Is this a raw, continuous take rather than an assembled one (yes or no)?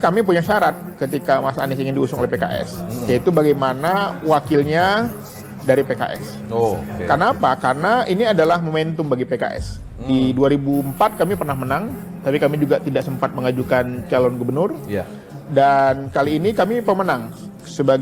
yes